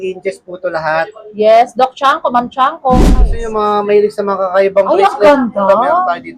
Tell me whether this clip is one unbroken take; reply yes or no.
no